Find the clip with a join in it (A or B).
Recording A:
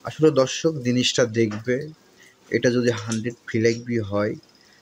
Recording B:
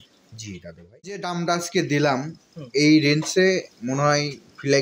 B